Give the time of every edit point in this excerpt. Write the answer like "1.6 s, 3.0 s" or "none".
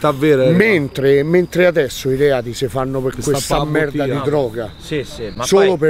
none